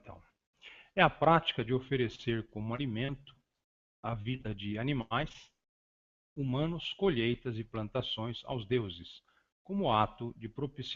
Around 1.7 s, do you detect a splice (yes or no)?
no